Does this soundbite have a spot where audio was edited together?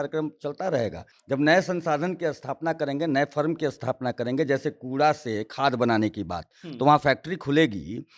yes; 1 cut; at 1.1 s

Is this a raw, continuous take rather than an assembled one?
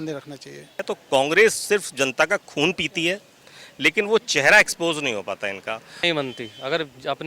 no; 2 cuts; at 0.9 s, 5.9 s

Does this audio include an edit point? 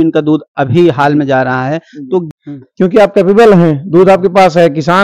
yes; 1 cut; at 2.4 s

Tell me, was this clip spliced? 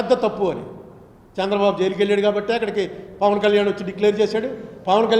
no; 0 cuts

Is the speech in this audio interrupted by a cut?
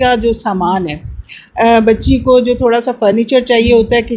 no; 0 cuts

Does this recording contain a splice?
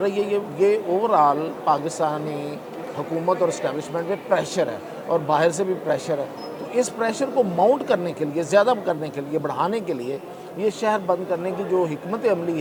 no; 0 cuts

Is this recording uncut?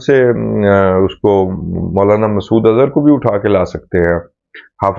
yes; 0 cuts

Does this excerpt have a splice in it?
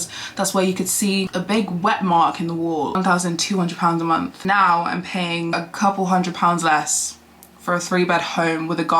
yes; 1 cut; at 2.9 s

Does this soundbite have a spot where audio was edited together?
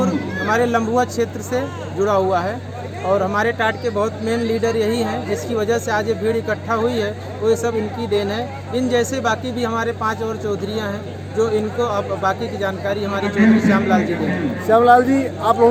no; 0 cuts

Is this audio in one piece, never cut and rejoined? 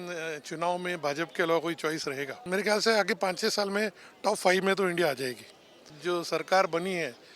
no; 2 cuts; at 2.4 s, 6.0 s

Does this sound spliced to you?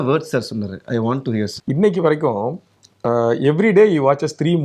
yes; 1 cut; at 1.6 s

